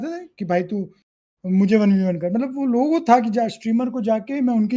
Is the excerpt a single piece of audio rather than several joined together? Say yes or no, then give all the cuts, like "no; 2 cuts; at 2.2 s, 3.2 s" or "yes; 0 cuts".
yes; 0 cuts